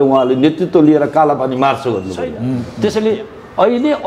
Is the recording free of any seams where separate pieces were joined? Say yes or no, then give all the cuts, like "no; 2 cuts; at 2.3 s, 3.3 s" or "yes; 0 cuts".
no; 1 cut; at 2.6 s